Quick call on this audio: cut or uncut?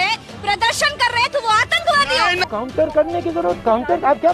cut